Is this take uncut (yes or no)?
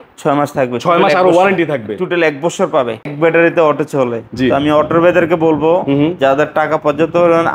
no